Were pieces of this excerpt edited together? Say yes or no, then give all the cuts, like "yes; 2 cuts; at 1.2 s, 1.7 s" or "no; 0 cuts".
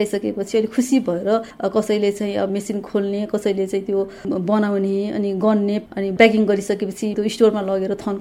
yes; 4 cuts; at 1.5 s, 2.5 s, 5.8 s, 7.1 s